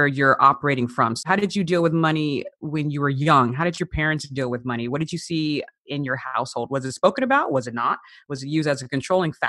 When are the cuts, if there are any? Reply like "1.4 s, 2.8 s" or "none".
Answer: 1.2 s